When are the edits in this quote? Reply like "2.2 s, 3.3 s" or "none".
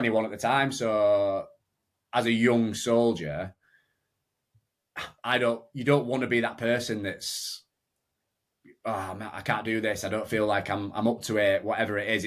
none